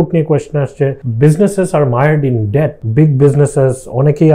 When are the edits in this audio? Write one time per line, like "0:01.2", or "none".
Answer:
0:01.0
0:02.8